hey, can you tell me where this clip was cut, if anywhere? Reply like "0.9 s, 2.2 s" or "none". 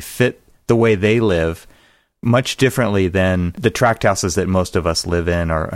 3.6 s